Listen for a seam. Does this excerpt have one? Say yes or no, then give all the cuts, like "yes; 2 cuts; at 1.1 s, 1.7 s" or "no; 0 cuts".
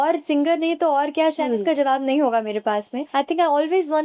yes; 1 cut; at 3.0 s